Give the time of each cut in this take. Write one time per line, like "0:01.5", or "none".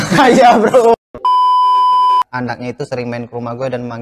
0:01.1
0:02.3